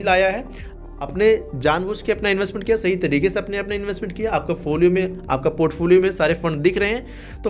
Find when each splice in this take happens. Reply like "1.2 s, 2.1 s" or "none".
none